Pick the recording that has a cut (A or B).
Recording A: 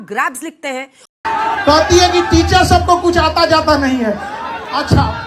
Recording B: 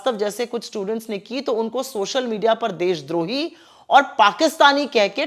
A